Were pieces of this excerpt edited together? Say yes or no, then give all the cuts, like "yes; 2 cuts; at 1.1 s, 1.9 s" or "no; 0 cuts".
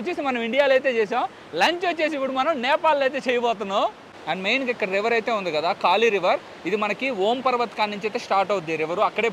no; 0 cuts